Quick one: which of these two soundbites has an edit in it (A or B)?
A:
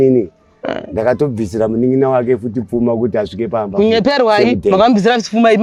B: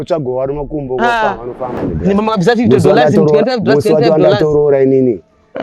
B